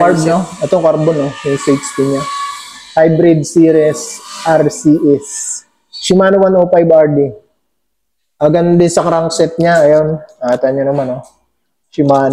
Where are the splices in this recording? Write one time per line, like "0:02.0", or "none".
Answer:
none